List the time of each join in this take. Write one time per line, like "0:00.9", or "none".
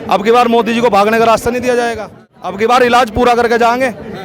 0:02.6